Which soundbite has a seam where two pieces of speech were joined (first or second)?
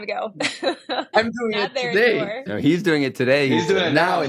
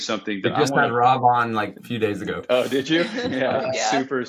first